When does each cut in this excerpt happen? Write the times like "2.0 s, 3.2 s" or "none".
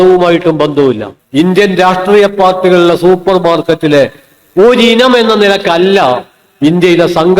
1.1 s